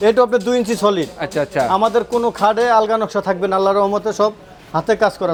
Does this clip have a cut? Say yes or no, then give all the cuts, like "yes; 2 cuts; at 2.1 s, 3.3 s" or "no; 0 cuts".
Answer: no; 0 cuts